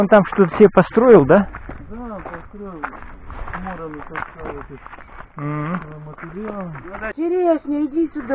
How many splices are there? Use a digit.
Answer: 1